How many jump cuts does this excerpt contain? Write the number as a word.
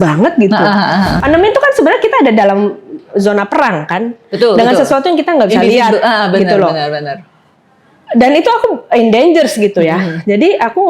one